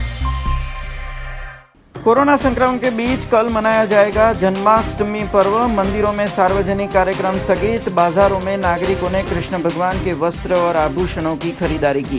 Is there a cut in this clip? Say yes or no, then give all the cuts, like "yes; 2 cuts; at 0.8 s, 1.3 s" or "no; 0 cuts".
yes; 1 cut; at 1.2 s